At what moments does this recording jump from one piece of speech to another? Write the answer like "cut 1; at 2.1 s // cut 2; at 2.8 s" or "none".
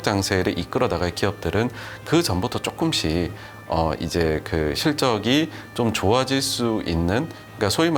none